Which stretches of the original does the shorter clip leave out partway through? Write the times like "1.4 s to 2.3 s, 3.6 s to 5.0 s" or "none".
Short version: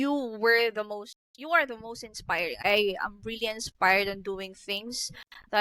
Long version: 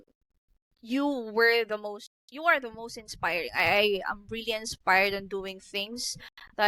3.6 s to 3.7 s